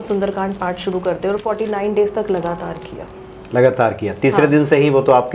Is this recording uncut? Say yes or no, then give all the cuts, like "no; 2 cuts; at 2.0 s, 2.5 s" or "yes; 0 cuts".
yes; 0 cuts